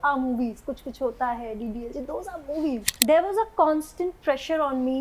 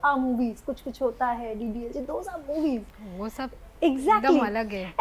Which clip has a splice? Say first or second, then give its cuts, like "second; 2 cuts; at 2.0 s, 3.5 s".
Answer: first; 1 cut; at 2.9 s